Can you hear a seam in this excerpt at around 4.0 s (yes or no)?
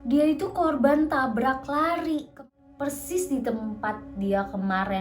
no